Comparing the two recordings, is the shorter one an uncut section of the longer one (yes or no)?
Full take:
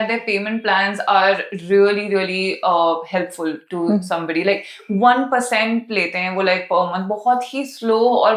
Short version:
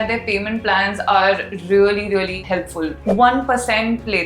no